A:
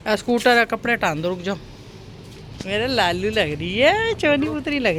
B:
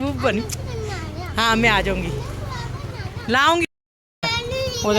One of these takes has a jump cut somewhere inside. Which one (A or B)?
B